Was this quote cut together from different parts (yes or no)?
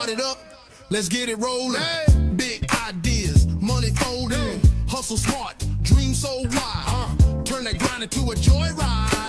no